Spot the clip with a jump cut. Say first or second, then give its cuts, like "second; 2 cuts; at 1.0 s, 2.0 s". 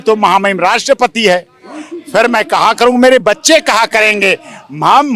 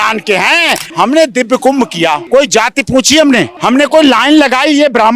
second; 3 cuts; at 0.8 s, 2.2 s, 3.5 s